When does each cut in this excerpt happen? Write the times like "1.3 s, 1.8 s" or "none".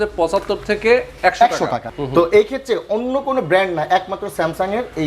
1.9 s